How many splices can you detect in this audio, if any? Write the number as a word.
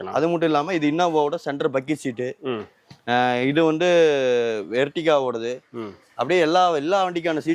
zero